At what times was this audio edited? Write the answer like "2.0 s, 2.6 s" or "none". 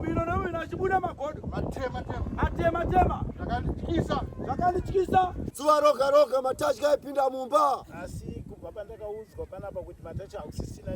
5.4 s